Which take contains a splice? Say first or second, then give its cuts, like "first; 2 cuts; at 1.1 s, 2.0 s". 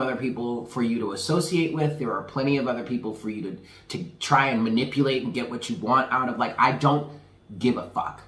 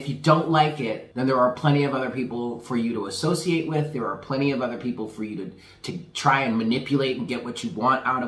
second; 1 cut; at 1.0 s